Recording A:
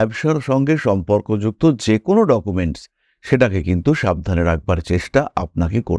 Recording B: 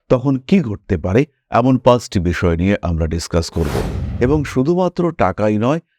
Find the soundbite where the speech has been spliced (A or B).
B